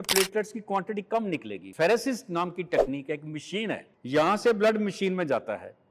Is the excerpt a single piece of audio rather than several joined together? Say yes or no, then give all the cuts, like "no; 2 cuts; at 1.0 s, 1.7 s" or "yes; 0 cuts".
no; 2 cuts; at 1.6 s, 3.9 s